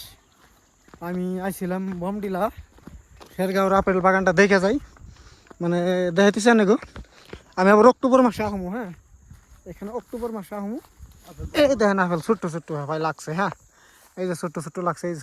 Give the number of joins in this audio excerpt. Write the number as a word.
zero